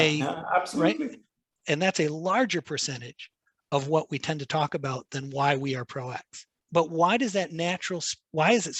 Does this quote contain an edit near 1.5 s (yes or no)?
yes